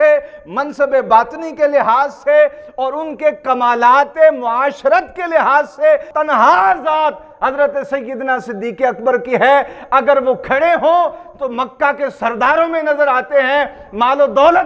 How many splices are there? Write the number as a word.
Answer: one